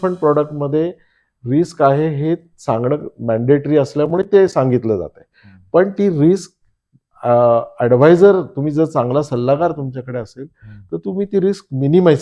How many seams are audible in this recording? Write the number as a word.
zero